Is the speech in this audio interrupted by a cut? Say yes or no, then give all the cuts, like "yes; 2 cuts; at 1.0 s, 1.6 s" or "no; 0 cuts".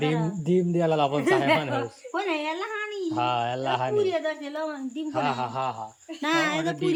no; 0 cuts